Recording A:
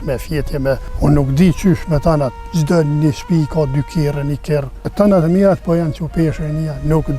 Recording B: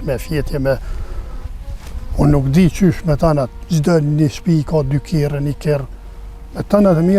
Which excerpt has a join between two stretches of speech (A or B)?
A